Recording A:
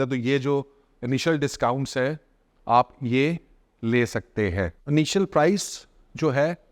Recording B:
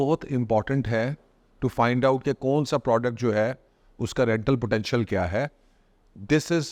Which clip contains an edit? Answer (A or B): A